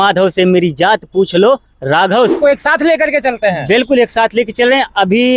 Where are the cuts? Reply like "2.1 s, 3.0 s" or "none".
2.4 s